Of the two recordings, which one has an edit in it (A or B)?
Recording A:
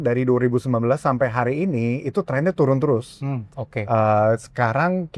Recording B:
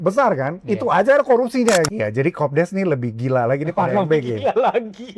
B